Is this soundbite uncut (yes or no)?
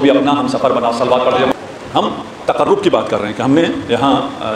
yes